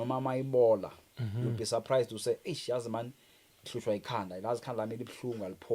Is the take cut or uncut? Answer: uncut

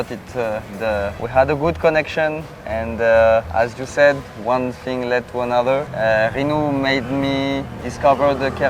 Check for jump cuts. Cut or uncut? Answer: cut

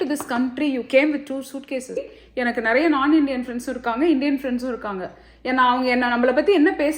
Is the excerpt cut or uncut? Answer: cut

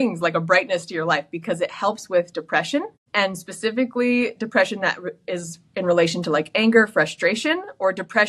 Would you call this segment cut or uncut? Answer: cut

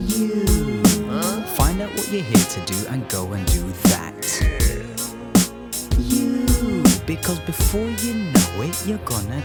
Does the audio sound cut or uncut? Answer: uncut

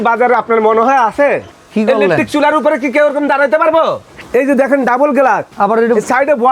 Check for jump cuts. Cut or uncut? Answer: cut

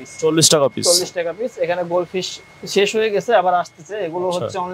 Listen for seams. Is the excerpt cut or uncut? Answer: uncut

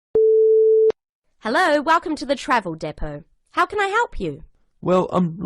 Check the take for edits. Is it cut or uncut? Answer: cut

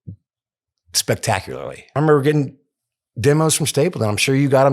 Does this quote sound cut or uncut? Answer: cut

